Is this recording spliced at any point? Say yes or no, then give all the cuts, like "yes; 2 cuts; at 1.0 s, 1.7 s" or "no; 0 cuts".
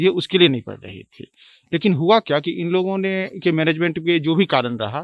no; 0 cuts